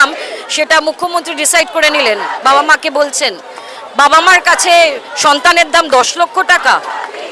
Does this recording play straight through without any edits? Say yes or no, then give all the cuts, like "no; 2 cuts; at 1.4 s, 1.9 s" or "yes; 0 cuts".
yes; 0 cuts